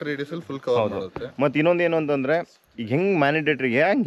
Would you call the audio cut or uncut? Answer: uncut